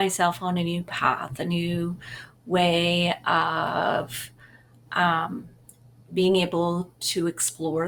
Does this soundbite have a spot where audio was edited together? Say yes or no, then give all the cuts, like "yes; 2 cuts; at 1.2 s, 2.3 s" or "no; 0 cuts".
no; 0 cuts